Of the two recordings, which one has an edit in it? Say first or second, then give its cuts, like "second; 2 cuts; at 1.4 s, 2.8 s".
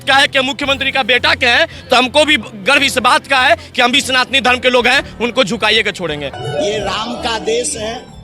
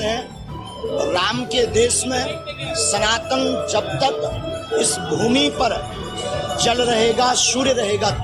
first; 1 cut; at 6.4 s